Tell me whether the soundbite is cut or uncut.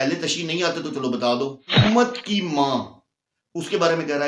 cut